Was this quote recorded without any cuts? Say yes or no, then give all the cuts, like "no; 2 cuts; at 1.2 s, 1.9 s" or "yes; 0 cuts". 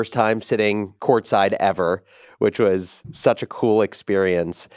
no; 1 cut; at 0.9 s